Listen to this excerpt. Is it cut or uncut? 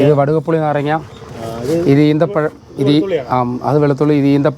uncut